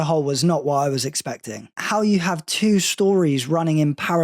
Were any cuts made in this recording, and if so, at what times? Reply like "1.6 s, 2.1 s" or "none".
1.8 s